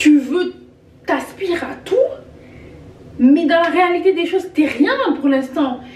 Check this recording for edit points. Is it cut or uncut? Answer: uncut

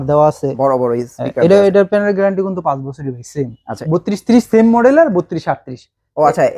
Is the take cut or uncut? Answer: cut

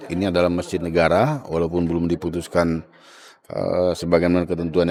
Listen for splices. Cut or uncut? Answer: uncut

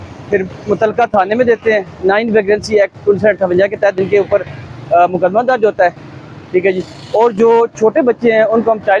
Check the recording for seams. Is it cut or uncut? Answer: uncut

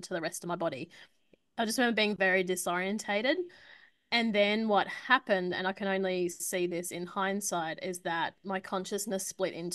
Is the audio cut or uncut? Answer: uncut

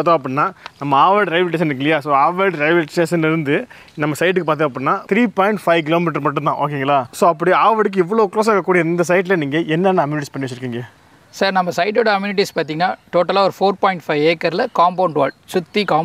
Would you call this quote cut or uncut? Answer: uncut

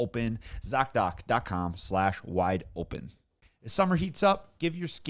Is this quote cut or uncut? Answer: cut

